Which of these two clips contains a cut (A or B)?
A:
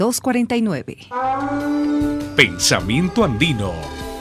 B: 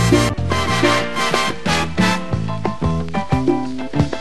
A